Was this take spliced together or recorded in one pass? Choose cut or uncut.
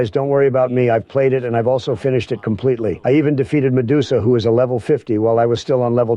cut